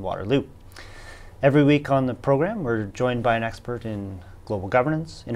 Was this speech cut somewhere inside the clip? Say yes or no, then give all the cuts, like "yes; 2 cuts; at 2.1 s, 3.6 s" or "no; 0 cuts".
yes; 1 cut; at 4.0 s